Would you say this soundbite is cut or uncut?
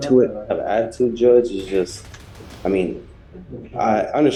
uncut